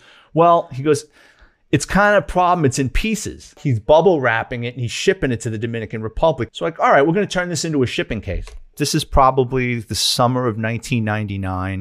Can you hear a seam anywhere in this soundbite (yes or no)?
yes